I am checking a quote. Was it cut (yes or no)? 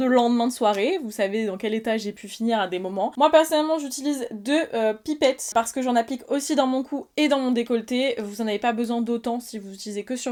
no